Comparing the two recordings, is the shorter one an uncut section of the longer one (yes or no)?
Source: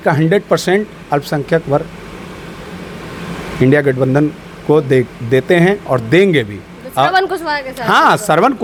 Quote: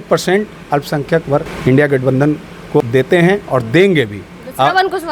no